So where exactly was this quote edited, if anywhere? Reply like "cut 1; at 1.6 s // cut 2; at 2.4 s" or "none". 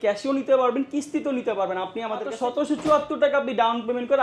cut 1; at 2.3 s